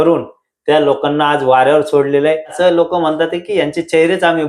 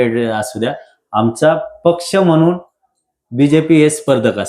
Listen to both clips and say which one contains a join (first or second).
first